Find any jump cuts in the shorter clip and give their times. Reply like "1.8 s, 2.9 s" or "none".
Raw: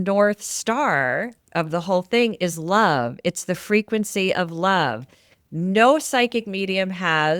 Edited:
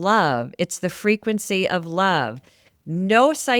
none